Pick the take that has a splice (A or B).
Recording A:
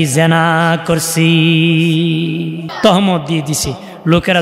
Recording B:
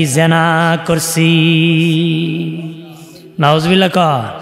A